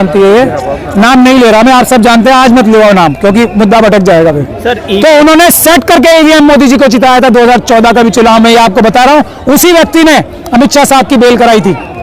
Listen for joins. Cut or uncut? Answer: uncut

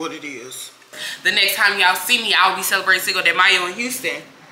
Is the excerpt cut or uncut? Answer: cut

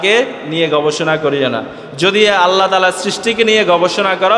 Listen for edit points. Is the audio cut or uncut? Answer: uncut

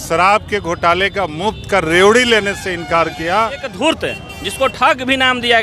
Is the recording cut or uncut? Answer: cut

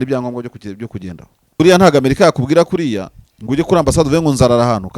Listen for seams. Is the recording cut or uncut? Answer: cut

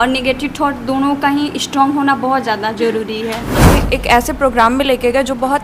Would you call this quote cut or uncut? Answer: cut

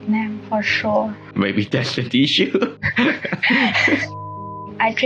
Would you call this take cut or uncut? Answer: cut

